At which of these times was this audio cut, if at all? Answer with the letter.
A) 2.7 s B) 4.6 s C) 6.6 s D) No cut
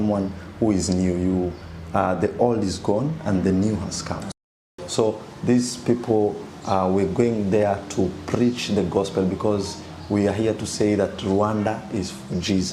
B